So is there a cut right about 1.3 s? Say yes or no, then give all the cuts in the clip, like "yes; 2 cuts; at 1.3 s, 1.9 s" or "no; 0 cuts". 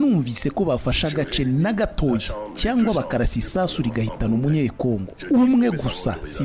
no; 0 cuts